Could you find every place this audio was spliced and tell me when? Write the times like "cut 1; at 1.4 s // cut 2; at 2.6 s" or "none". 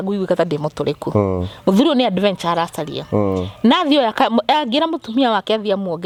none